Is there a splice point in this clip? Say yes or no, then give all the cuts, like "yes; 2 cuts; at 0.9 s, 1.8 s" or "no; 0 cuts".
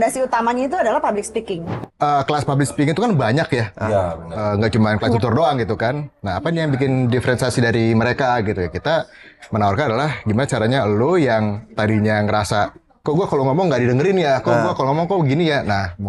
yes; 1 cut; at 1.7 s